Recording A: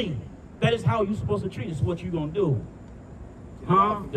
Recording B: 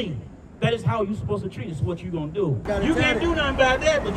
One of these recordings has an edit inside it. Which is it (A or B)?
B